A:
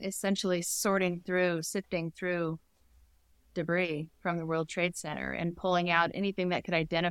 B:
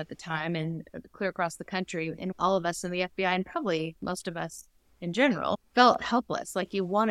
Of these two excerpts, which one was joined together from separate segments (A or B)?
B